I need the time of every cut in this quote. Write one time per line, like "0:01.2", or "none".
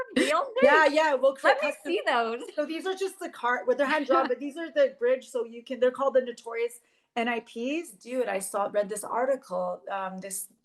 0:08.0